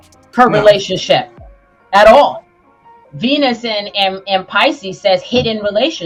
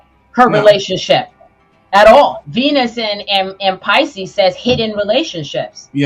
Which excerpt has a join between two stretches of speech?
second; 1 cut; at 2.4 s

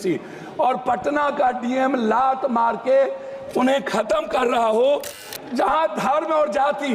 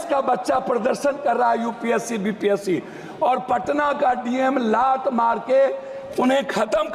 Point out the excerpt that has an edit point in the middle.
first; 1 cut; at 5.3 s

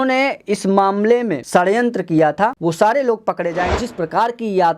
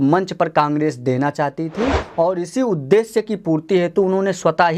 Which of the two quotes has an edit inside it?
first; 3 cuts; at 1.4 s, 2.6 s, 3.8 s

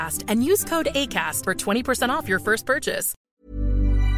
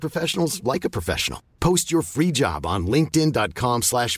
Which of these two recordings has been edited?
first; 1 cut; at 3.1 s

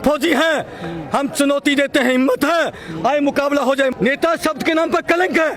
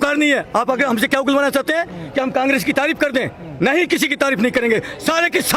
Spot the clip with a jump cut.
first; 1 cut; at 3.9 s

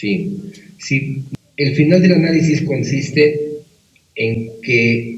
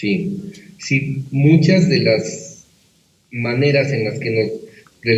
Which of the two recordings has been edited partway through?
first; 1 cut; at 1.2 s

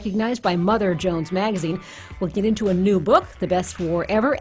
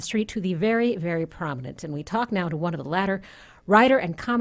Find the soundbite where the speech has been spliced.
second; 1 cut; at 1.5 s

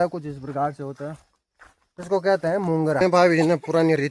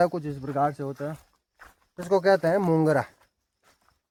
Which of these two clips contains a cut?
first; 1 cut; at 3.0 s

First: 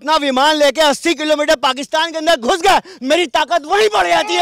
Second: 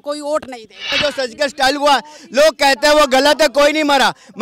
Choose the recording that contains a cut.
second; 1 cut; at 0.9 s

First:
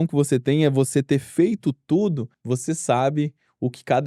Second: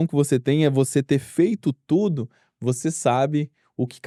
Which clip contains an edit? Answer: first; 1 cut; at 2.3 s

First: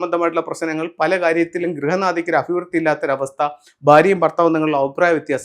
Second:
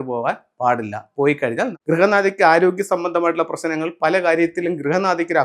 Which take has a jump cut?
second; 1 cut; at 1.8 s

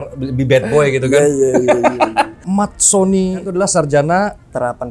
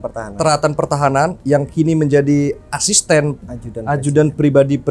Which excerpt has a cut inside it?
first; 2 cuts; at 2.4 s, 3.4 s

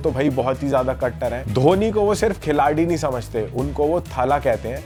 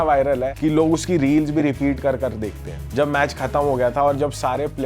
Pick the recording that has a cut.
second; 1 cut; at 2.8 s

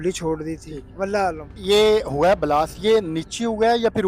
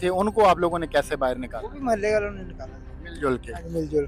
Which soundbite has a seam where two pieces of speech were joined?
first; 1 cut; at 1.6 s

